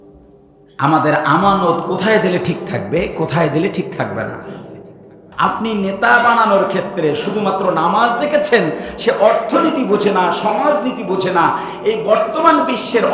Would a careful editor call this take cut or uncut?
cut